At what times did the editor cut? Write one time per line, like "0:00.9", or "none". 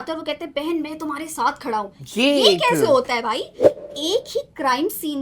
0:03.8